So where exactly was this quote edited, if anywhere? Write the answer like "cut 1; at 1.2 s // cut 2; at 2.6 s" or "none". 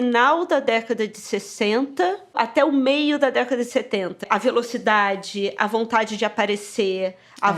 cut 1; at 2.3 s // cut 2; at 4.1 s

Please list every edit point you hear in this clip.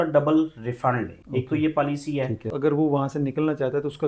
cut 1; at 1.2 s // cut 2; at 2.5 s

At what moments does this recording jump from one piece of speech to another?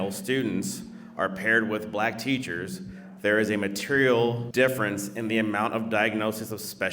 cut 1; at 4.4 s

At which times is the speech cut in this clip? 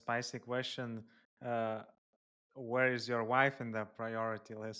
none

